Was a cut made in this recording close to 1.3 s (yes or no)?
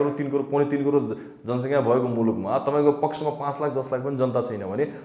no